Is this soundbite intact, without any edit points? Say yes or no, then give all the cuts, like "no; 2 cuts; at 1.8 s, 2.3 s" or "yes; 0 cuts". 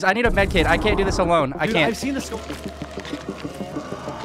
yes; 0 cuts